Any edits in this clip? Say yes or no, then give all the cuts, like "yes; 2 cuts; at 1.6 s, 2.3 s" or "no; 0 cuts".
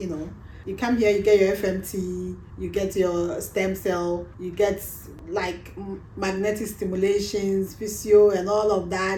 no; 0 cuts